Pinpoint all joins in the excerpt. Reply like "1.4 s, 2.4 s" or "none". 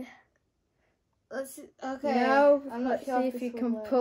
none